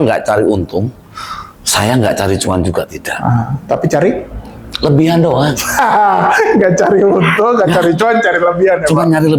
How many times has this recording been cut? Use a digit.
0